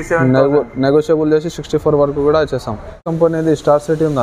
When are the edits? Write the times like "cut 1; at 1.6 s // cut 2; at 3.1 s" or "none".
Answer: cut 1; at 3.1 s